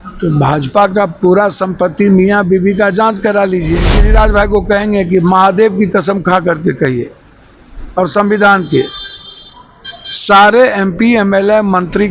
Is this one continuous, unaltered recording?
no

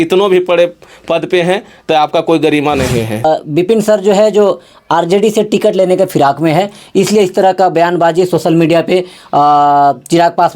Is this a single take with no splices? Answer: no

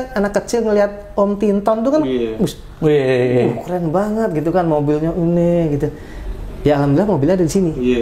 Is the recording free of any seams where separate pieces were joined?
yes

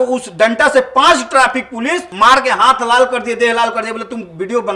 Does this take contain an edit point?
yes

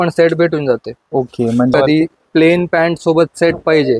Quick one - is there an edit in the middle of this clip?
yes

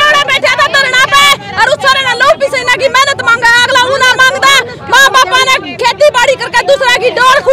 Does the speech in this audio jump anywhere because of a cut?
no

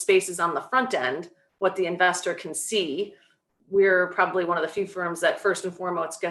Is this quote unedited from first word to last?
yes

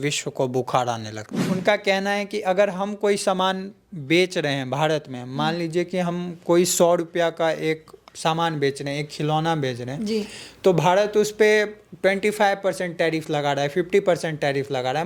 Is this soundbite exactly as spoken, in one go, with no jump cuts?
no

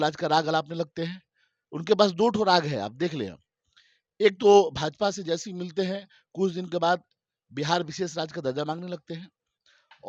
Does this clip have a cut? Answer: no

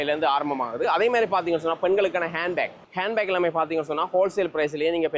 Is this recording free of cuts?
yes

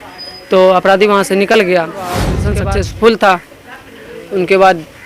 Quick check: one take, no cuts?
no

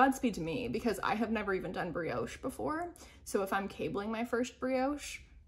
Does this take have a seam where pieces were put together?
no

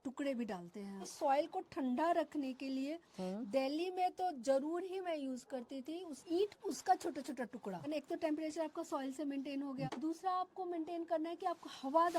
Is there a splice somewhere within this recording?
yes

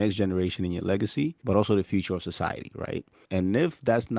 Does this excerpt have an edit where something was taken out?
yes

